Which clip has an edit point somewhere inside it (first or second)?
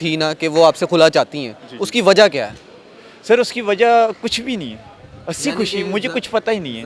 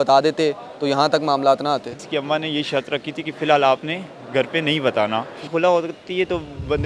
second